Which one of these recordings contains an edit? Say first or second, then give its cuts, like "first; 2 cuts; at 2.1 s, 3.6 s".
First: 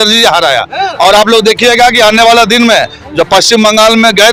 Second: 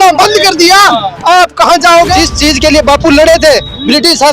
second; 1 cut; at 2.1 s